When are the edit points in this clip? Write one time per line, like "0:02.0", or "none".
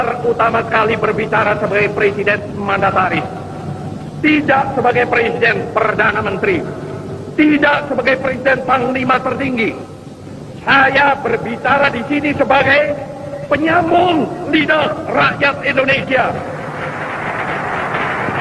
none